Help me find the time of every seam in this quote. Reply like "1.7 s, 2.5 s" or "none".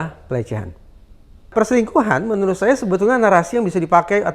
1.5 s